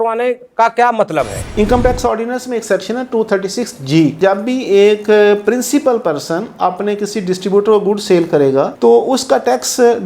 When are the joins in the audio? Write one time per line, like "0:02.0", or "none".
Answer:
0:01.4
0:04.2